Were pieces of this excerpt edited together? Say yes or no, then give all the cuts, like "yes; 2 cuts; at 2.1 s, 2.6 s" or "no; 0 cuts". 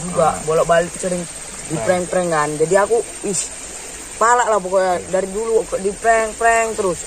no; 0 cuts